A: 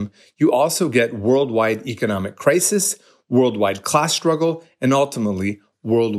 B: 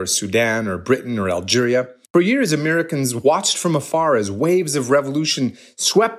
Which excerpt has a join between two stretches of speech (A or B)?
B